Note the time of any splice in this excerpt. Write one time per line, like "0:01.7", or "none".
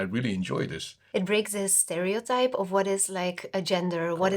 0:00.9